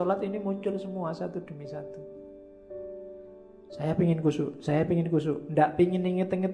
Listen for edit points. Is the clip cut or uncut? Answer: cut